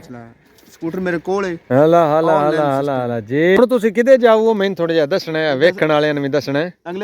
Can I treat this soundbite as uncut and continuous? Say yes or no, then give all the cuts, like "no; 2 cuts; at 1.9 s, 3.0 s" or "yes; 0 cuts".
no; 1 cut; at 3.6 s